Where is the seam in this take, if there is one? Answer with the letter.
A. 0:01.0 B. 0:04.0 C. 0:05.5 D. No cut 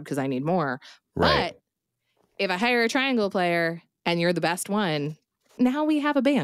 C